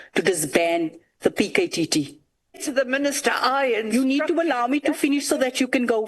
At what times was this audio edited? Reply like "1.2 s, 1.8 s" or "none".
2.6 s